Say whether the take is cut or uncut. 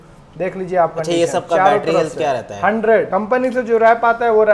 uncut